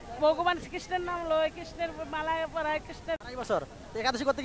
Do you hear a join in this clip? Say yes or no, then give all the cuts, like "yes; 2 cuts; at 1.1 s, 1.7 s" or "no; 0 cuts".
yes; 1 cut; at 3.2 s